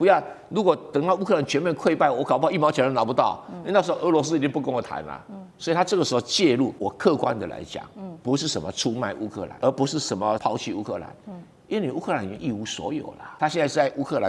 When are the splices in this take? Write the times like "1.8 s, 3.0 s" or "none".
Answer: 6.8 s, 9.5 s, 10.4 s, 13.2 s